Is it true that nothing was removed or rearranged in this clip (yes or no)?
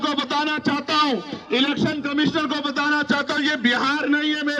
yes